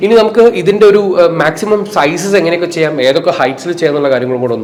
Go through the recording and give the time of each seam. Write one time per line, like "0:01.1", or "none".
none

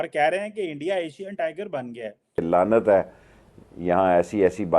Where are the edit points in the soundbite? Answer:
0:02.4

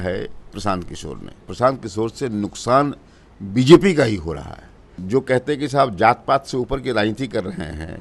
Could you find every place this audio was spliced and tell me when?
0:01.4
0:04.9

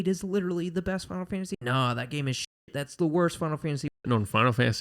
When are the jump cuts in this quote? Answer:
0:01.6
0:03.9

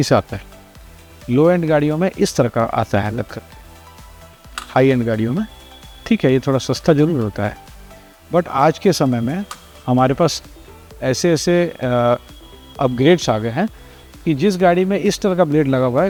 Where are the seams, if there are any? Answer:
none

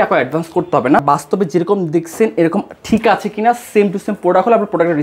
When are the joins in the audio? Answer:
0:01.0

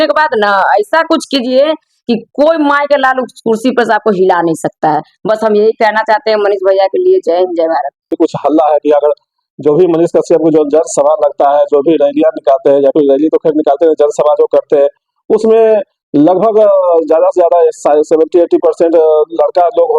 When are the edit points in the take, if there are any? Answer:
0:08.1

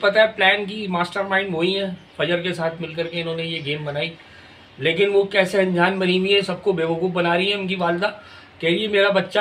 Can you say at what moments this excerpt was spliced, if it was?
none

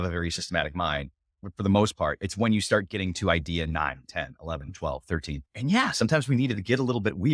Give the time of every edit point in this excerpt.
0:01.4

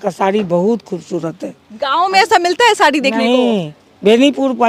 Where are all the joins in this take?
none

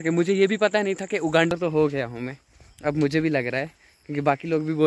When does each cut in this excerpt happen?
0:01.5

